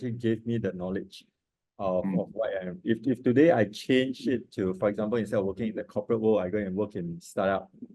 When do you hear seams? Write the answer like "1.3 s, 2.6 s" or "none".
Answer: none